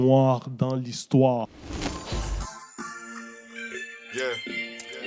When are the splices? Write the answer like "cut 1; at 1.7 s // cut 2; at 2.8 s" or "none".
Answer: cut 1; at 1.6 s